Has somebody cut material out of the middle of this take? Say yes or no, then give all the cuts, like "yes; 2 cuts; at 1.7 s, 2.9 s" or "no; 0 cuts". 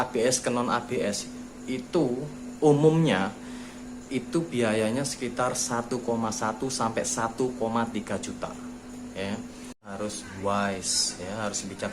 yes; 1 cut; at 9.9 s